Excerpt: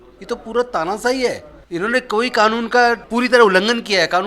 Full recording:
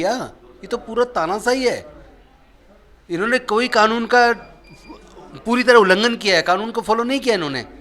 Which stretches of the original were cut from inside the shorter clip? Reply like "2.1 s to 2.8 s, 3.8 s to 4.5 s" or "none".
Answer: 1.9 s to 2.9 s, 4.4 s to 5.4 s

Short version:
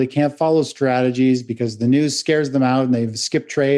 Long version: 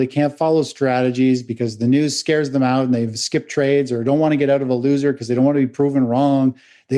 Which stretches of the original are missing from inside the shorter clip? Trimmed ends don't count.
none

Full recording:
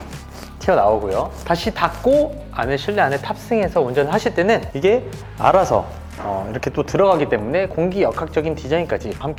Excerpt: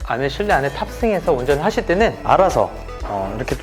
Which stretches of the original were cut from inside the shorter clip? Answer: 4.7 s to 5.3 s

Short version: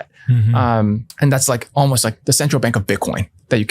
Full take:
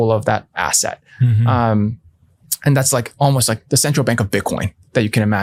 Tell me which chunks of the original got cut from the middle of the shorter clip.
2.0 s to 2.5 s

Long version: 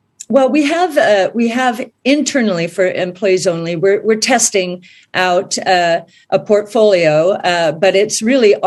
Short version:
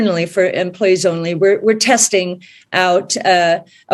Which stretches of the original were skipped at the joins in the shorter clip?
none

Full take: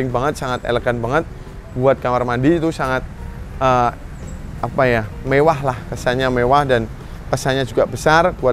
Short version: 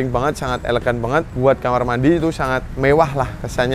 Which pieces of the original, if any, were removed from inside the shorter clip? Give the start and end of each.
1.3 s to 1.7 s, 3.1 s to 5.2 s

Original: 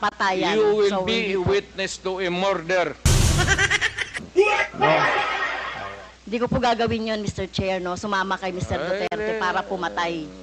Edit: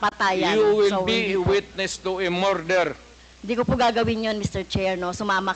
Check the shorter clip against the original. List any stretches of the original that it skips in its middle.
3.0 s to 5.8 s

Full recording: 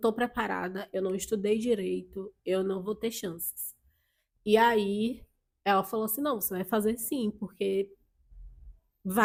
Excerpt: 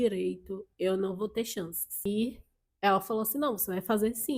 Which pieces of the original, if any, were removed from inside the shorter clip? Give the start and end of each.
3.7 s to 4.9 s

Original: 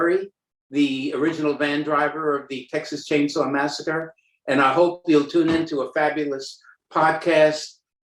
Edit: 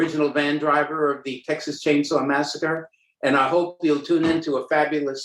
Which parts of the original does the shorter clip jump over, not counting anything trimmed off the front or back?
none

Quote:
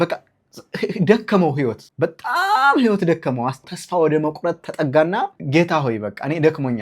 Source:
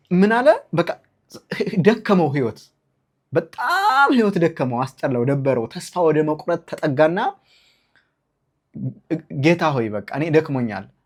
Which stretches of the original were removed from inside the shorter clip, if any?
2.6 s to 3.2 s, 5.0 s to 5.7 s, 7.4 s to 9.3 s

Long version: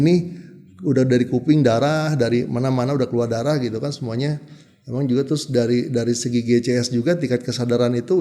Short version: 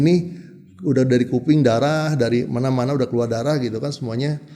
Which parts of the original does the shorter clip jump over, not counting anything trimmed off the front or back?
none

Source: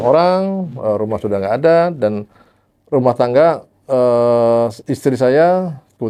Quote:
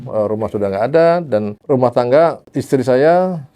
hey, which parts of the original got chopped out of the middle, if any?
2.2 s to 2.8 s, 3.7 s to 4.8 s

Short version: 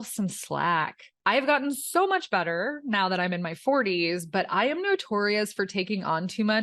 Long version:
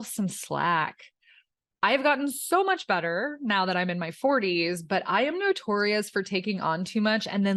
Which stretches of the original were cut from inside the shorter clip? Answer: 1.0 s to 1.6 s

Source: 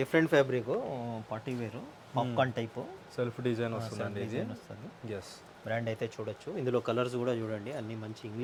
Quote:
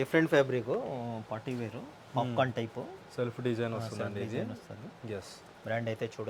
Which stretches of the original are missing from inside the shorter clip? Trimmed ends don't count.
none

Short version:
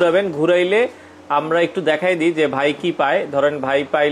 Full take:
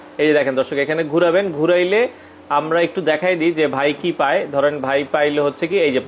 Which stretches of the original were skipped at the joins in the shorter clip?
none

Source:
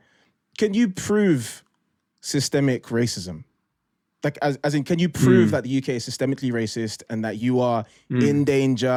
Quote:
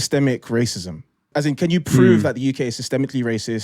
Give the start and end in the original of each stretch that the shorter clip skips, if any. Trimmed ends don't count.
3.7 s to 4.6 s

